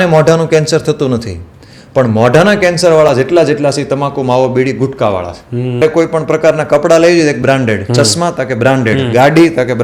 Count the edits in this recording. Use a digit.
1